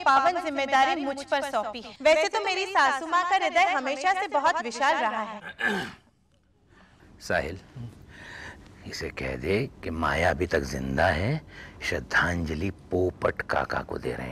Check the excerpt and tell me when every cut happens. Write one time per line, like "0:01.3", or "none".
0:01.8